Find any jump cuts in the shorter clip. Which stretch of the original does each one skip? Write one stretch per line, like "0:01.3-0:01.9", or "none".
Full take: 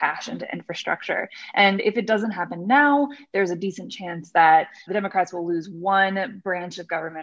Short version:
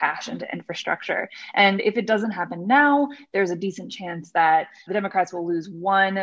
none